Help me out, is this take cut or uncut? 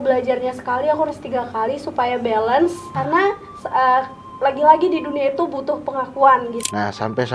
cut